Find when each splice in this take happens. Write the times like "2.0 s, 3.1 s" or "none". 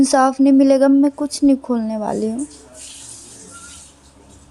none

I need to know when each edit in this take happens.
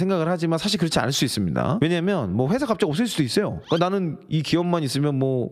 3.6 s

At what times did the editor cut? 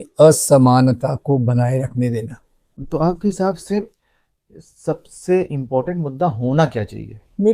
2.8 s

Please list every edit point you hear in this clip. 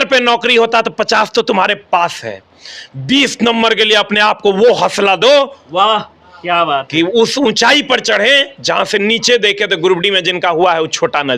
none

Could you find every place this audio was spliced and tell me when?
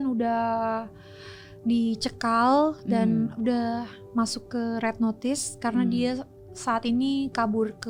none

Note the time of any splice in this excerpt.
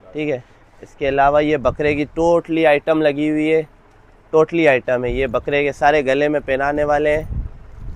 none

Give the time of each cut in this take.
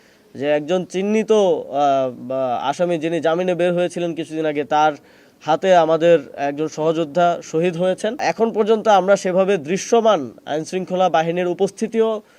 8.2 s

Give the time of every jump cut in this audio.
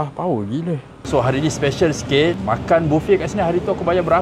0.9 s

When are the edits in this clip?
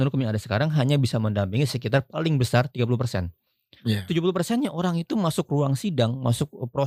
none

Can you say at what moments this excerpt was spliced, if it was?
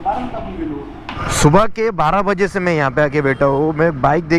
1.2 s

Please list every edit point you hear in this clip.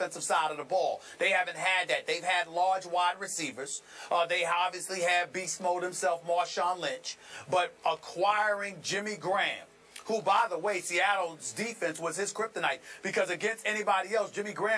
7.5 s

